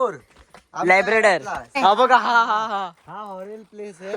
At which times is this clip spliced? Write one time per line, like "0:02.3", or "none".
0:01.8